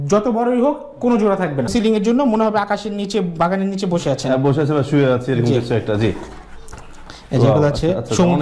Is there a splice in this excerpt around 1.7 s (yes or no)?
yes